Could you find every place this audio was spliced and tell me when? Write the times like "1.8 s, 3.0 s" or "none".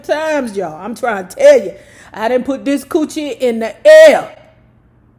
none